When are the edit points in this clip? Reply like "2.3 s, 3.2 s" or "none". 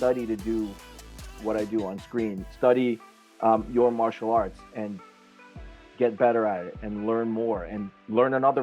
2.4 s